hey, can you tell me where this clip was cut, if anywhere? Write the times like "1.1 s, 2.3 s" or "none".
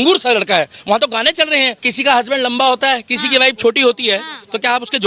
1.8 s

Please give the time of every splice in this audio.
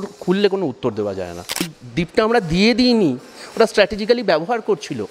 1.8 s

